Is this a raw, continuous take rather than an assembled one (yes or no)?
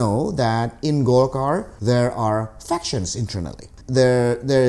no